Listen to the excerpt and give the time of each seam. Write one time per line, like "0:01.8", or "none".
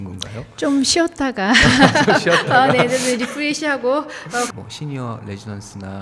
0:04.5